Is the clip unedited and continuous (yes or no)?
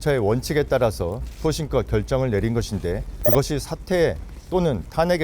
no